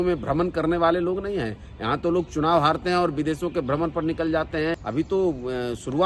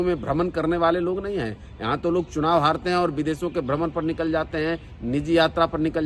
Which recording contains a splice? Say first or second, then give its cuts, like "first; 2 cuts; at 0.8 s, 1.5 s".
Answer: first; 1 cut; at 4.8 s